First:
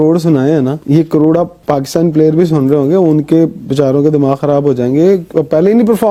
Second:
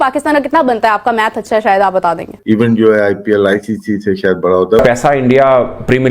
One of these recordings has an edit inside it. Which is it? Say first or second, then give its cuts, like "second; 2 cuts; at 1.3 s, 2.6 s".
second; 2 cuts; at 2.4 s, 4.8 s